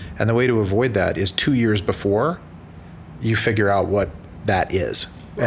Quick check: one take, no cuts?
no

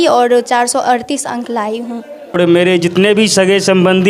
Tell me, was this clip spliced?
yes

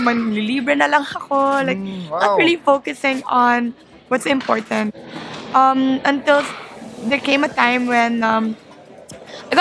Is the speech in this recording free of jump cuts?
yes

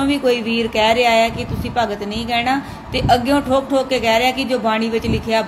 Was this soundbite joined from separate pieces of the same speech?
no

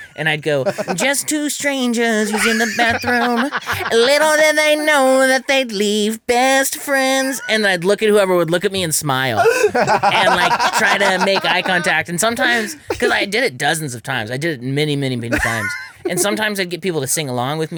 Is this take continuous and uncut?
yes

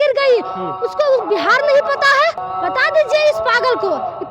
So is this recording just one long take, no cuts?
no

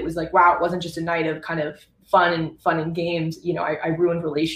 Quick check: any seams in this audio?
no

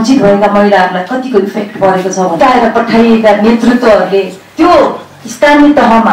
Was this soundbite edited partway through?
yes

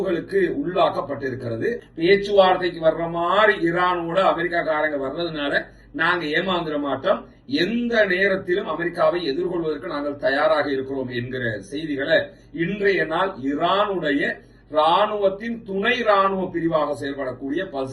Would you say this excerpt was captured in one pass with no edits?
no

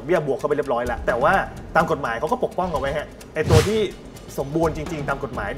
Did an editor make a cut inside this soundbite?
yes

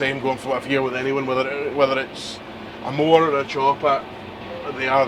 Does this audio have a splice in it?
no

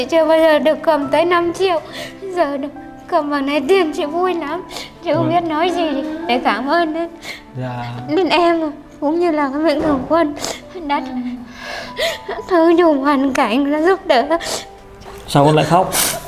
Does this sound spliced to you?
yes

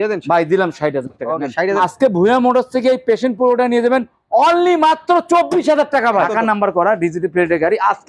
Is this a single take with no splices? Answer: no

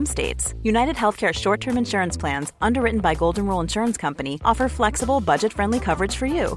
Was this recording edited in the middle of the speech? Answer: no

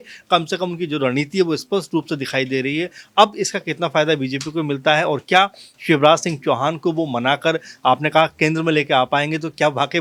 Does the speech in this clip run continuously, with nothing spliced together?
yes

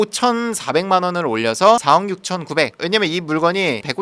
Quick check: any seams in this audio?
no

